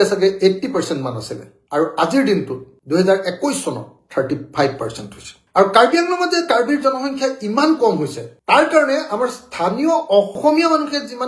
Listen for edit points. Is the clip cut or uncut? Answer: uncut